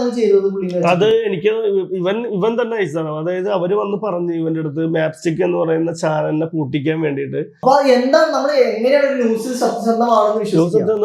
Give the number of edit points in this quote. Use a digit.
1